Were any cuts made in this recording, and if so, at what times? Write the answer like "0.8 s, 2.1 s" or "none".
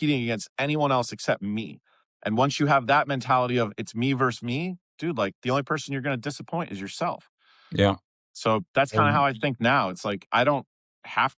none